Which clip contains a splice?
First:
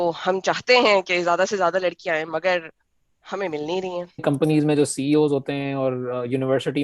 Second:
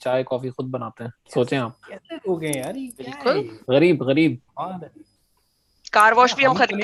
first; 1 cut; at 4.2 s

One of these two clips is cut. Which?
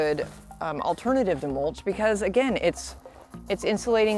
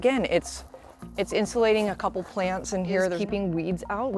second; 1 cut; at 3.2 s

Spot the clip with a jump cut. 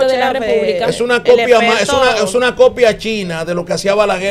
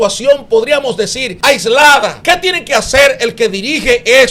second; 2 cuts; at 1.2 s, 2.2 s

